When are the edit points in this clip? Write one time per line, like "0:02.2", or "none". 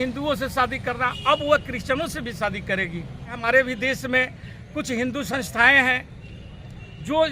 0:03.4